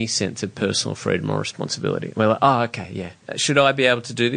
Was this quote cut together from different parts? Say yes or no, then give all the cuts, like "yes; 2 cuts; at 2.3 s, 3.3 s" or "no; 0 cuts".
yes; 1 cut; at 3.3 s